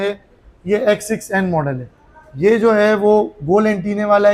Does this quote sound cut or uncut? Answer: uncut